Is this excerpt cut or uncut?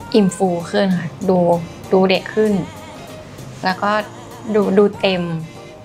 uncut